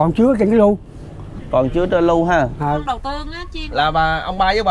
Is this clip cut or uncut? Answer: cut